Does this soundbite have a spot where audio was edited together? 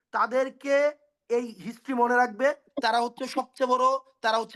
no; 0 cuts

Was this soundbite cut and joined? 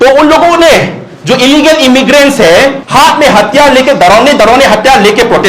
yes; 1 cut; at 2.8 s

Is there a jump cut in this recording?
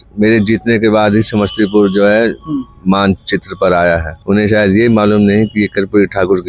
yes; 1 cut; at 4.1 s

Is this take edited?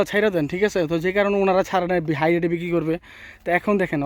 no; 0 cuts

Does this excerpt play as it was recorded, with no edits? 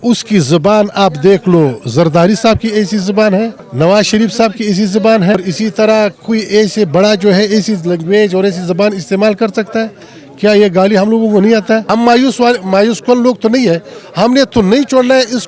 no; 3 cuts; at 3.6 s, 5.4 s, 11.9 s

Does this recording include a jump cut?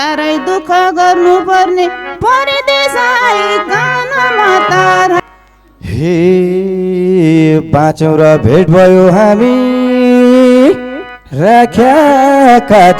yes; 1 cut; at 5.2 s

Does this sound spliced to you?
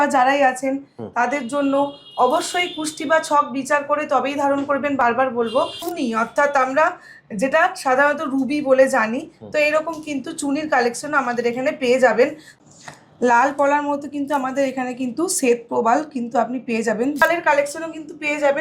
yes; 3 cuts; at 5.8 s, 12.5 s, 17.2 s

